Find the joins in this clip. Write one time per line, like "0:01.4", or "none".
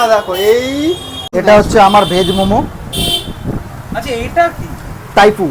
0:01.2